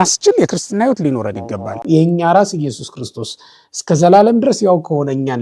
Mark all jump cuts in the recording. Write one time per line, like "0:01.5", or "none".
0:01.8